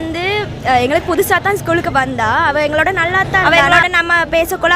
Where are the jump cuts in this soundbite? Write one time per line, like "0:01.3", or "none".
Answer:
0:03.4

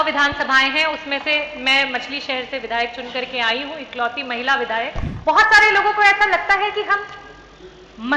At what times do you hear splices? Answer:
0:05.1

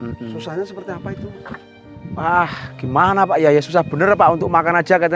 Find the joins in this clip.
none

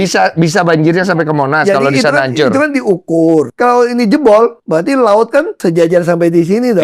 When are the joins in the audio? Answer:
0:03.5
0:04.6
0:05.5

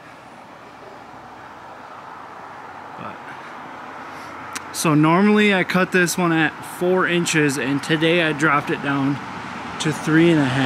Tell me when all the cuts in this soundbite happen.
none

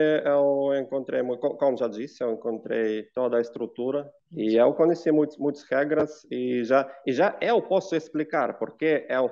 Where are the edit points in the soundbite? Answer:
0:04.2

